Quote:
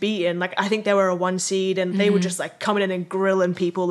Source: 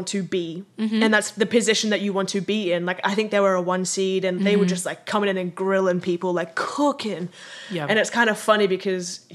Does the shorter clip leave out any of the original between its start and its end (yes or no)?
no